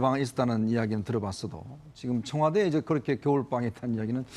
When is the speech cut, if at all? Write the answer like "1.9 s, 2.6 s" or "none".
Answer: 2.9 s